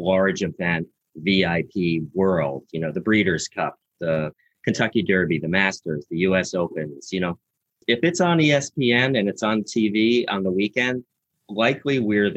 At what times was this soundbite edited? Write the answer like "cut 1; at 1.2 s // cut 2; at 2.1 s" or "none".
cut 1; at 7.8 s